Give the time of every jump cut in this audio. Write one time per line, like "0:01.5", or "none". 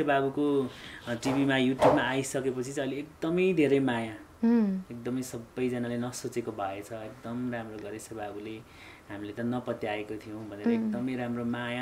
none